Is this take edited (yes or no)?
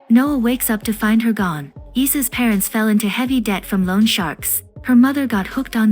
yes